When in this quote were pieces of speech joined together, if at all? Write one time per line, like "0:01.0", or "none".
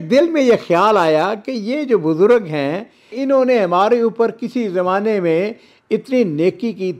none

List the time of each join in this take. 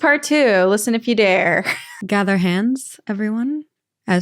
0:01.9

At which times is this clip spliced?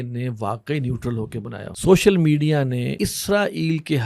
0:01.7
0:02.9

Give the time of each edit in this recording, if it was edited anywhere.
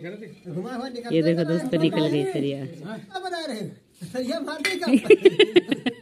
0:03.1

